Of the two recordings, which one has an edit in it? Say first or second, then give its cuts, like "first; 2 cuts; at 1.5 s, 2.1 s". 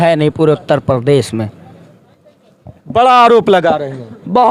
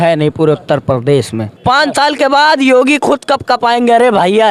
second; 1 cut; at 1.5 s